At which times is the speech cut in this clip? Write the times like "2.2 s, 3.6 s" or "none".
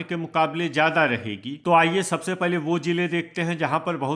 1.5 s